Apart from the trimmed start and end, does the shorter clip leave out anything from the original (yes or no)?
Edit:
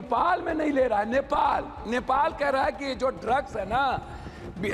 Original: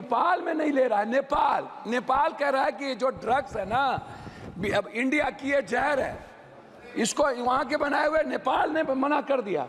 no